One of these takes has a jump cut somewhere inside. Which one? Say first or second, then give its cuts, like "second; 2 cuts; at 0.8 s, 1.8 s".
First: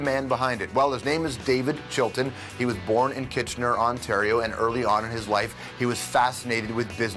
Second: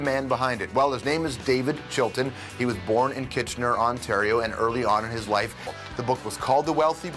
first; 1 cut; at 5.6 s